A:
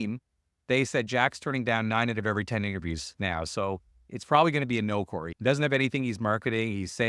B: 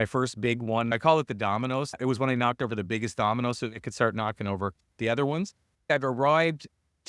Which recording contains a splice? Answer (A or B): B